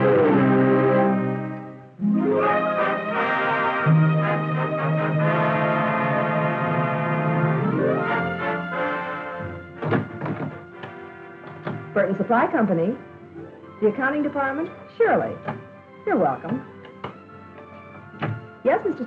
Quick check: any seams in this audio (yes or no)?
no